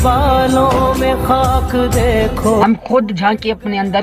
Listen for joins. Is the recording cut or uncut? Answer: uncut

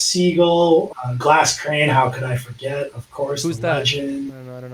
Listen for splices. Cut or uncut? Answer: cut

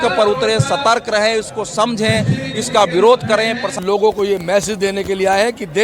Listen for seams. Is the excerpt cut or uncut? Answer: cut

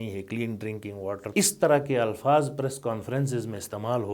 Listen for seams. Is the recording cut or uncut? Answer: cut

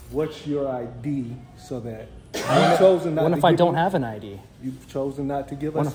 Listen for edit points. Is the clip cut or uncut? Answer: uncut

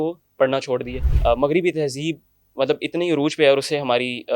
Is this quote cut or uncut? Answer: cut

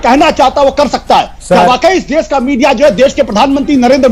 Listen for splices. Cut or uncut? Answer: uncut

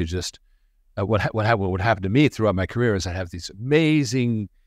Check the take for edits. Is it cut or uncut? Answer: uncut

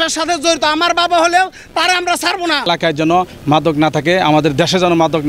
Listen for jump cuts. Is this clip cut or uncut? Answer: cut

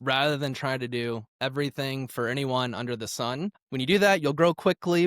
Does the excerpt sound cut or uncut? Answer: uncut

